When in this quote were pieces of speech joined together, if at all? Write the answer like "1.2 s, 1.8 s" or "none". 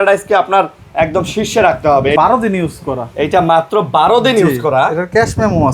2.2 s